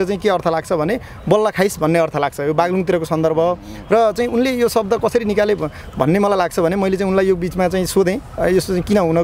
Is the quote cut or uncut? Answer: uncut